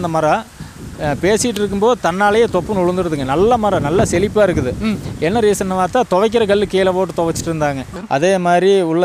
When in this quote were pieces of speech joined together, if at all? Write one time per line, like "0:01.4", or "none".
0:07.9